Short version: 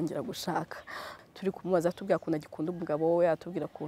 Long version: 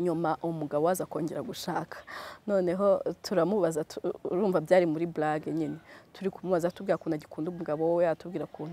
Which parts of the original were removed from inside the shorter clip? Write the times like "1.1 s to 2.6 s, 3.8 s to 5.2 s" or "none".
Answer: 2.3 s to 5.9 s